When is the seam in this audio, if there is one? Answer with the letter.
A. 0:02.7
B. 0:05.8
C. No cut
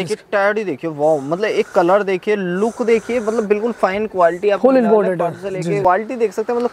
B